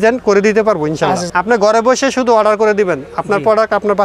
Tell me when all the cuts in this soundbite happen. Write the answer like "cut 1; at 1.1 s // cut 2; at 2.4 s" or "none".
cut 1; at 1.2 s